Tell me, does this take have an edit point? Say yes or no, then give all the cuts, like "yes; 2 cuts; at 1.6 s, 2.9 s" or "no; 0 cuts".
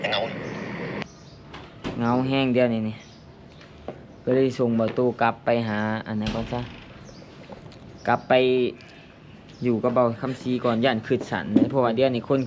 no; 0 cuts